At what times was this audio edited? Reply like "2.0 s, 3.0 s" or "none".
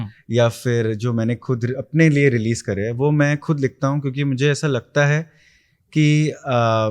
none